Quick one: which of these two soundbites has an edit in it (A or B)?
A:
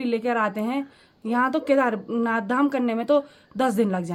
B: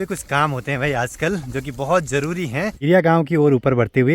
B